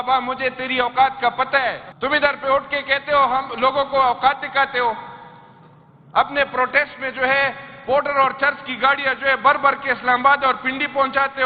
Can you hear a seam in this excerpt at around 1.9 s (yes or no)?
yes